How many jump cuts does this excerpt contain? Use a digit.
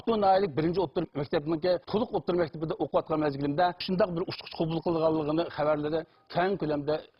0